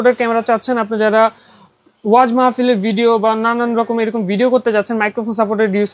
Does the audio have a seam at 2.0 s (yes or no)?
no